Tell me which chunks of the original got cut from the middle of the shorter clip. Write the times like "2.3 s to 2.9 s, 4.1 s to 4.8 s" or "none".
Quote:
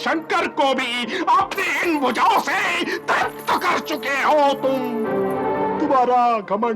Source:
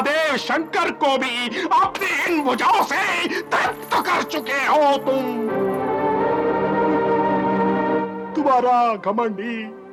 6.2 s to 8.3 s